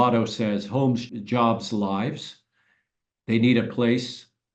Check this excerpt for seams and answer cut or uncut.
cut